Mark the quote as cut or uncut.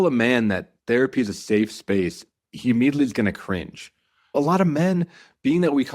cut